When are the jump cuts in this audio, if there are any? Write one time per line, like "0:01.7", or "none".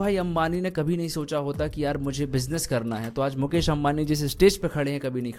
none